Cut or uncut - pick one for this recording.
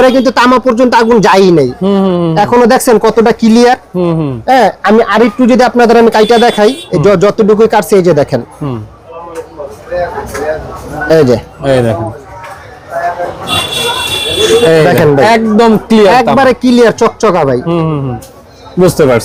uncut